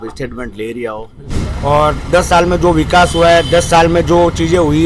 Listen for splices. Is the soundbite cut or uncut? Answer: cut